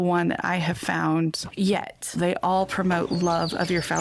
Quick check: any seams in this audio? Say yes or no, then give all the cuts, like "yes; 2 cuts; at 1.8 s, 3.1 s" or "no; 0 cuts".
yes; 1 cut; at 1.9 s